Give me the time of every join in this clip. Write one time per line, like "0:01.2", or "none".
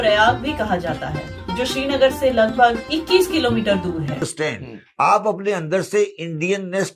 0:04.3